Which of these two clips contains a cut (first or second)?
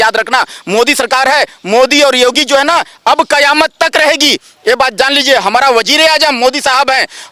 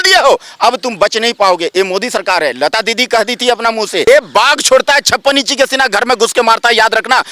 second